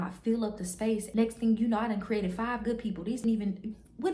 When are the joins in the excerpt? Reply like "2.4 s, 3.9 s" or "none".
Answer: 1.1 s, 3.2 s